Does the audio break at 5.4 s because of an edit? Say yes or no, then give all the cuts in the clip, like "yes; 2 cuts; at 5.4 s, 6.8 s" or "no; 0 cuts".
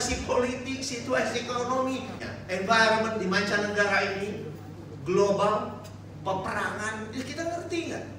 no; 1 cut; at 2.2 s